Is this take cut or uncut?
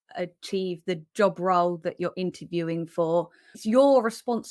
cut